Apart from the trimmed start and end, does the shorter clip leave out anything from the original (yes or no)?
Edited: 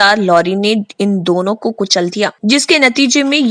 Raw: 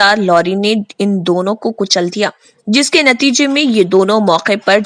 yes